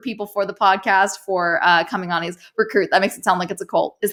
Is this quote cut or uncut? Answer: uncut